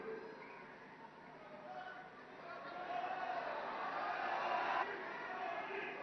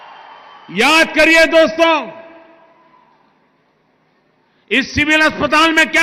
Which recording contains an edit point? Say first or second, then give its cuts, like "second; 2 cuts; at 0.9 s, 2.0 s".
first; 1 cut; at 4.8 s